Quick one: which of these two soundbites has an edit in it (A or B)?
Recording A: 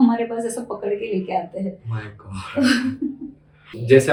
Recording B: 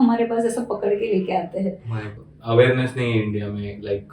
B